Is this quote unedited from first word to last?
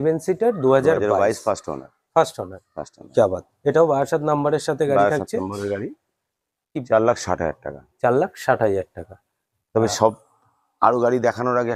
yes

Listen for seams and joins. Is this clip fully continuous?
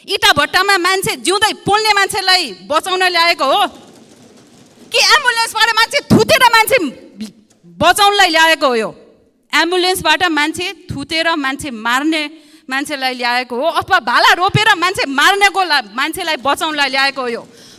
yes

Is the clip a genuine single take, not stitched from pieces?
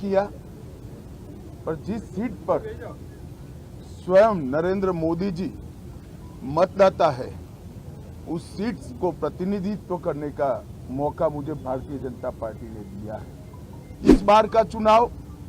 no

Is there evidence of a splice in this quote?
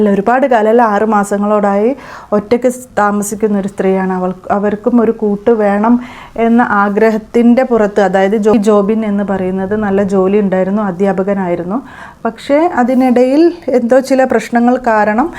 yes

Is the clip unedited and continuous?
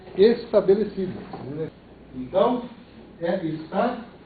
no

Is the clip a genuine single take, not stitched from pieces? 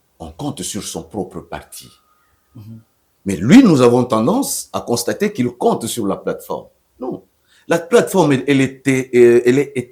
yes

